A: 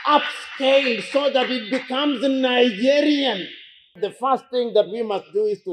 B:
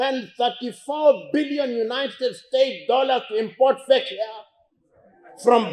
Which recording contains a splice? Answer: A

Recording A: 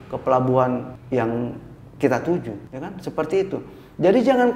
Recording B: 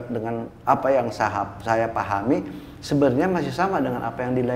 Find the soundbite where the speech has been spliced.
A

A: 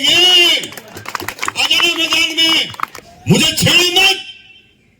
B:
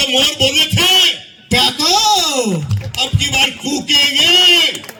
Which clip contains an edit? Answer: A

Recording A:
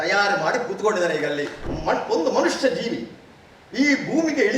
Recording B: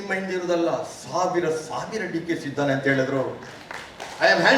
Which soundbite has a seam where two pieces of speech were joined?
A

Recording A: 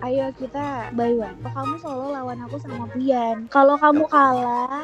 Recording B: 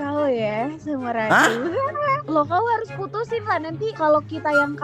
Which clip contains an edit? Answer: B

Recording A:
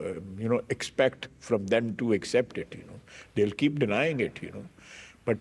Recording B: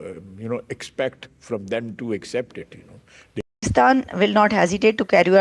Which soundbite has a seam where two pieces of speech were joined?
B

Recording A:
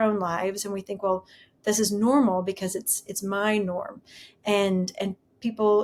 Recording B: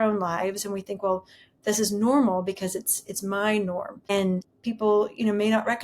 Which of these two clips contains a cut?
B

